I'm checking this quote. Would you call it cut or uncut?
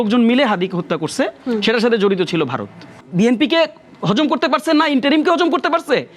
cut